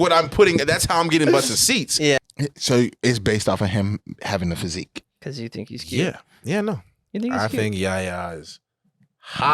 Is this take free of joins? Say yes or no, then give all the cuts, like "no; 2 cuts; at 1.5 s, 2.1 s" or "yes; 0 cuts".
no; 1 cut; at 2.2 s